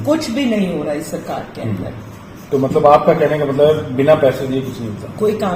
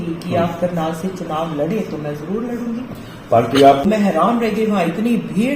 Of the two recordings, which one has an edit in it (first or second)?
second